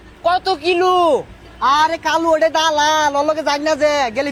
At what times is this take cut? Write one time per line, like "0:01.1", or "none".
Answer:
none